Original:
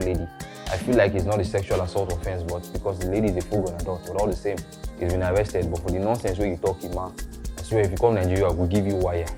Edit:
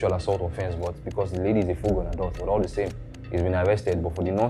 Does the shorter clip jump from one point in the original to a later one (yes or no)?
no